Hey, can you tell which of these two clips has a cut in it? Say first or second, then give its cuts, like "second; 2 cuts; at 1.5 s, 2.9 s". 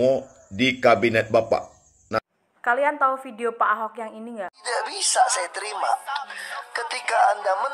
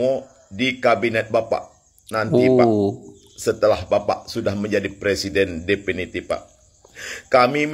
first; 1 cut; at 2.2 s